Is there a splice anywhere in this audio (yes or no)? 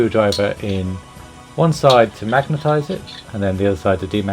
yes